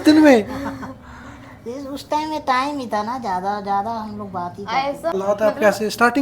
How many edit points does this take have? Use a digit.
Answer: 1